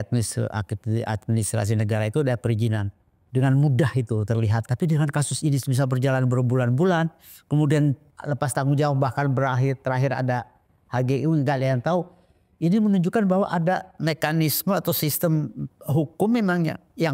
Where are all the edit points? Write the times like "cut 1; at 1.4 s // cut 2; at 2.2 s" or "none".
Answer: cut 1; at 4.6 s // cut 2; at 8.1 s // cut 3; at 14.0 s